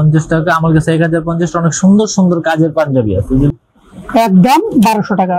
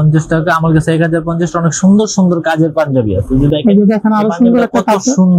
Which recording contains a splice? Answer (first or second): first